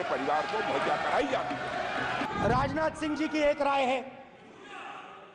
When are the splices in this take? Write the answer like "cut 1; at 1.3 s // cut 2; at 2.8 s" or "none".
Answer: cut 1; at 2.3 s